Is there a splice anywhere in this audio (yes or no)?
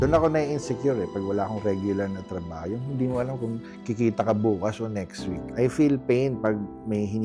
yes